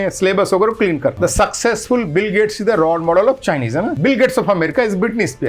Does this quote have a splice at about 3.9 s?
yes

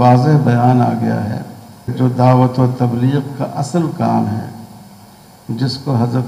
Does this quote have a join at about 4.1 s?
no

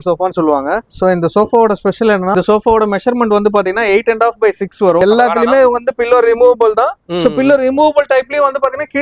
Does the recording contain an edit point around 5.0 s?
yes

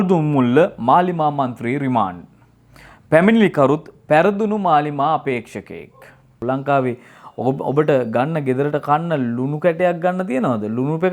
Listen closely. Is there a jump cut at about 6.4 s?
yes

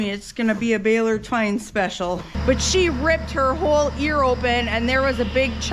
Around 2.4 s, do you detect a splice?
yes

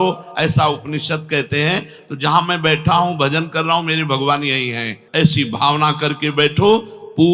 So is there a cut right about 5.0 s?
yes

